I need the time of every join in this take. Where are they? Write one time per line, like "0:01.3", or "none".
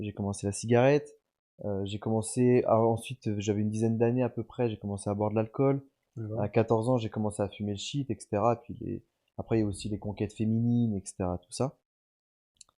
none